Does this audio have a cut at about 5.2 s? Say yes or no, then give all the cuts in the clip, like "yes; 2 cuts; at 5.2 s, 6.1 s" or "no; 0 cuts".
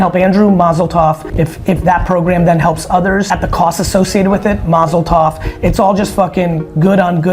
no; 2 cuts; at 1.2 s, 3.3 s